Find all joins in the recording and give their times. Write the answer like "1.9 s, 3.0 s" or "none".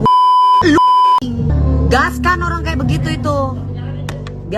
1.5 s